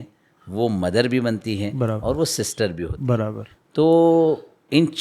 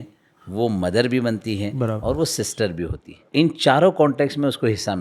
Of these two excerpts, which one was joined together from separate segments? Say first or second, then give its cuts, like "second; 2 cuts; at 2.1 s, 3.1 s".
second; 1 cut; at 3.0 s